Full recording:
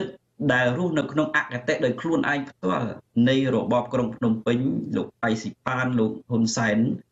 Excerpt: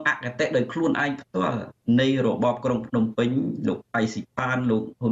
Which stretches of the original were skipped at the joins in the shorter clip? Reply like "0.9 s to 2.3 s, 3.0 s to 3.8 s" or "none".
none